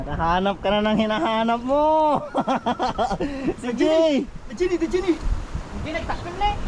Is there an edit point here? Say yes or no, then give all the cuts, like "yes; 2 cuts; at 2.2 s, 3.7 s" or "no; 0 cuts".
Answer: no; 0 cuts